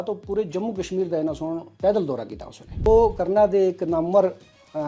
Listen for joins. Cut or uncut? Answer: cut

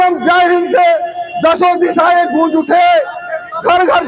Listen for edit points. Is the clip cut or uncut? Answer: uncut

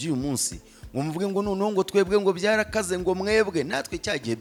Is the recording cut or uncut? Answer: uncut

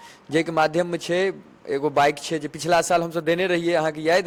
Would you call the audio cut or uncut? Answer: uncut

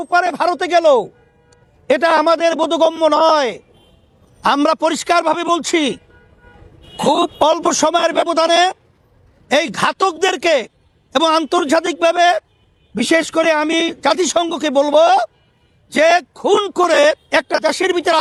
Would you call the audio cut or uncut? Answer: uncut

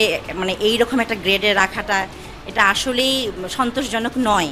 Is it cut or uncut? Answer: uncut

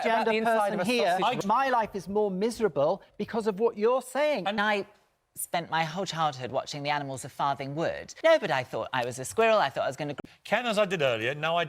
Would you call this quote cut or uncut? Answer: cut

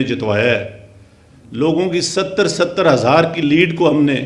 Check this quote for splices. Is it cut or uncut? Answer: uncut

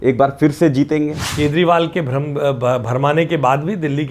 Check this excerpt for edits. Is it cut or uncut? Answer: cut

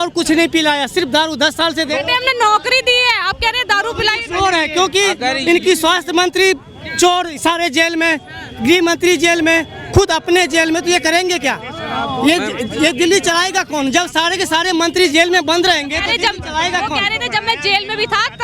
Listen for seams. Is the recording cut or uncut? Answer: uncut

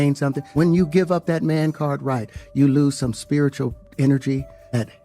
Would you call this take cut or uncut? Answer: cut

